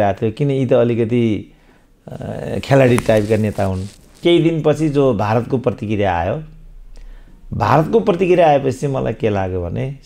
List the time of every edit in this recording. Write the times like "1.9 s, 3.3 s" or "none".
4.2 s